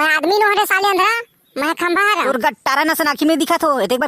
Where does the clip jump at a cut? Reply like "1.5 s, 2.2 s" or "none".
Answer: 2.3 s